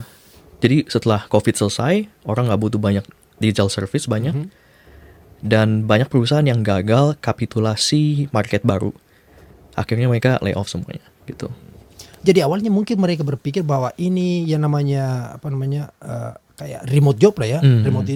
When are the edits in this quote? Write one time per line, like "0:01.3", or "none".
none